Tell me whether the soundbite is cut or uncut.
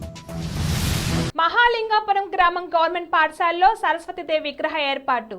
cut